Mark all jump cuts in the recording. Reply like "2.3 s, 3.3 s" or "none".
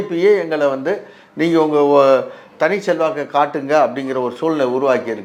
none